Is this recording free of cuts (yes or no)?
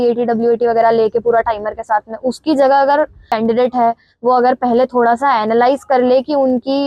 no